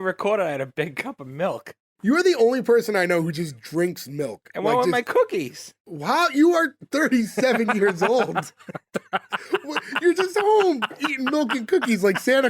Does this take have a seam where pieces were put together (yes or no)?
yes